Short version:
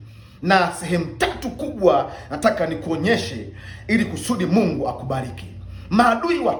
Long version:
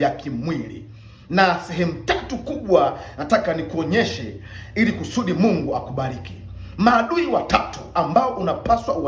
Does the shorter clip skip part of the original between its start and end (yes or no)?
no